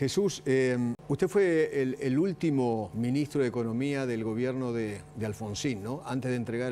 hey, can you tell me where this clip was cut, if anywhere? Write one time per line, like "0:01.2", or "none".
0:01.0
0:02.9